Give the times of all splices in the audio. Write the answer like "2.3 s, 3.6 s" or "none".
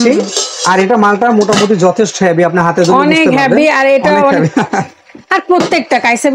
none

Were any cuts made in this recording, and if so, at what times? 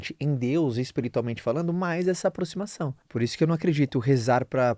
3.0 s

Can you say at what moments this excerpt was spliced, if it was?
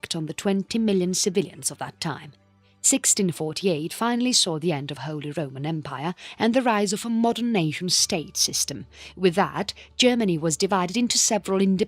4.2 s

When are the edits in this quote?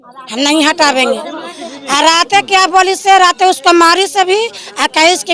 none

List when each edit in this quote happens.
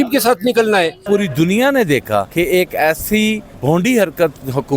1.1 s, 2.3 s, 3.5 s

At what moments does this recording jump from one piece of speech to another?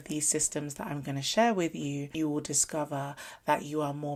none

